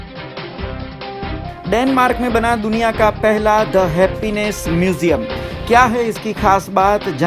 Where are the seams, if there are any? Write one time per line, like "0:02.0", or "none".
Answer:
0:01.2